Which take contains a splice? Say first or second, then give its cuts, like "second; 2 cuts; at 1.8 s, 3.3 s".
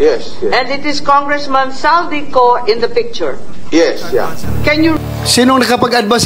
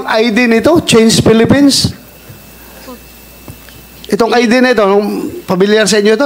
first; 1 cut; at 5.0 s